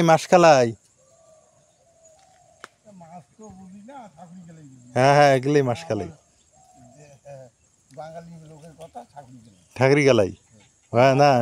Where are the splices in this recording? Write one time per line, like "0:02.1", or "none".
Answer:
none